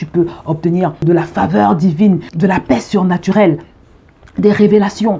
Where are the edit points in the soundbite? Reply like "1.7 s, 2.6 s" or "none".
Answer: 1.0 s, 2.3 s